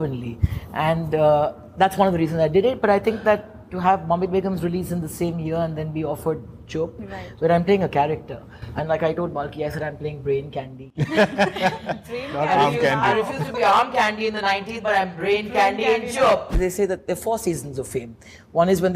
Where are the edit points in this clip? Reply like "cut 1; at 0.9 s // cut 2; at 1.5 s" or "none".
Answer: cut 1; at 16.5 s